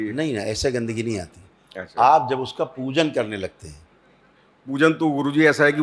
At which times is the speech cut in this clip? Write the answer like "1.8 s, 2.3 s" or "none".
none